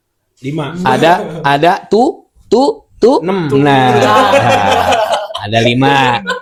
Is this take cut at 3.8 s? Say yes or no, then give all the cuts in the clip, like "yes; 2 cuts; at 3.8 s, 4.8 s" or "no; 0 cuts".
no; 0 cuts